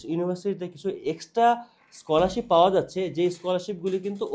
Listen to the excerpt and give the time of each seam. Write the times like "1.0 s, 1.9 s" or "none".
none